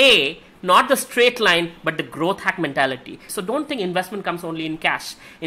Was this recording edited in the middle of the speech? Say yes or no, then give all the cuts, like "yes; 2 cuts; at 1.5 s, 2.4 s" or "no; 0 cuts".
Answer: yes; 1 cut; at 3.3 s